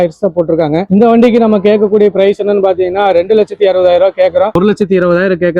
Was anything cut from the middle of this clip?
yes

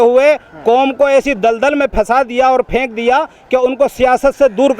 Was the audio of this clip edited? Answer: no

